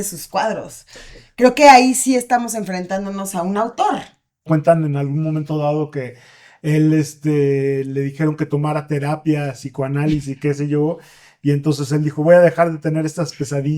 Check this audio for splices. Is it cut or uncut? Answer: cut